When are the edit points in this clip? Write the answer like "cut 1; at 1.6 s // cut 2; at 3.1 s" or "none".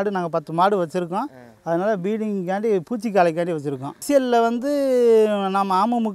cut 1; at 4.0 s